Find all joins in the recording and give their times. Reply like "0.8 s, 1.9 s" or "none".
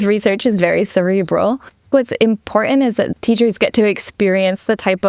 1.9 s, 3.1 s

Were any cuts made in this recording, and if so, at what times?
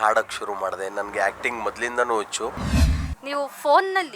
2.7 s

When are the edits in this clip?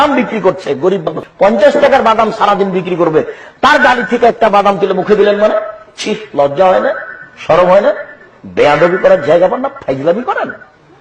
1.0 s

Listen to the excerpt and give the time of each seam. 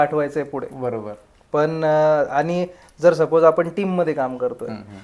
none

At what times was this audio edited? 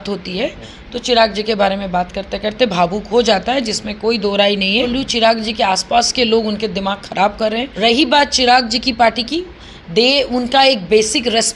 4.9 s, 7.7 s

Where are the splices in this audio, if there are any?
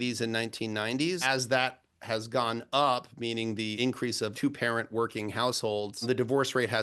1.2 s, 3.8 s, 6.0 s

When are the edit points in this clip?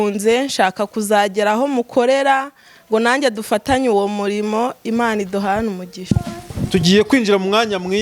5.9 s

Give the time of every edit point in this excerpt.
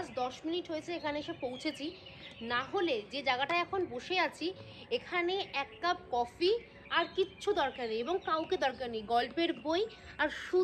none

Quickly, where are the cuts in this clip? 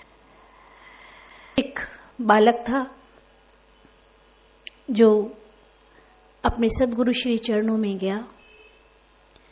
1.0 s

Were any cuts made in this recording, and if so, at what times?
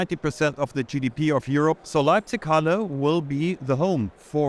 1.8 s

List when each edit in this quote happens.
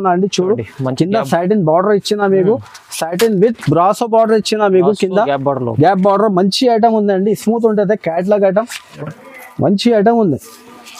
8.9 s

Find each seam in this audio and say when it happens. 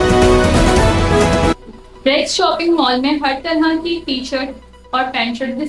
1.6 s

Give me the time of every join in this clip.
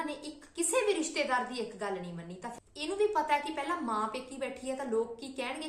2.4 s

